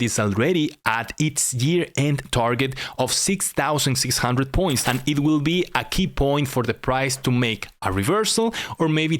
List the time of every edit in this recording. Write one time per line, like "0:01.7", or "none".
0:04.8